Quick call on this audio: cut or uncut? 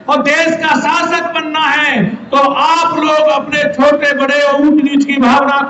uncut